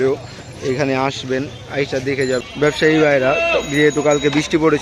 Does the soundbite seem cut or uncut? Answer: cut